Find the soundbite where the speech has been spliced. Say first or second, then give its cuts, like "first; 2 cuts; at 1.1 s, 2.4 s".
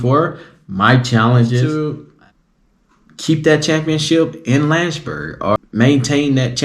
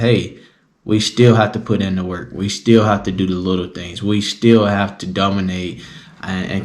first; 2 cuts; at 1.7 s, 5.7 s